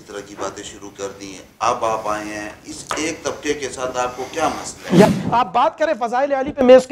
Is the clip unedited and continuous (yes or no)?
no